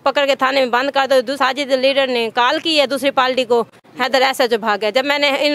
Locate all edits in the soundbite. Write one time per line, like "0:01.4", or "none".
0:01.3
0:03.8